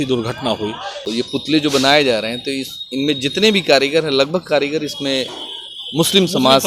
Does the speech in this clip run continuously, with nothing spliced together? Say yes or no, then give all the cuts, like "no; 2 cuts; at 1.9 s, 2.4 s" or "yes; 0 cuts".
no; 1 cut; at 1.1 s